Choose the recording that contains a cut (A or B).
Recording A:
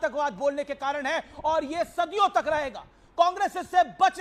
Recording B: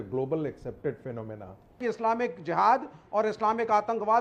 B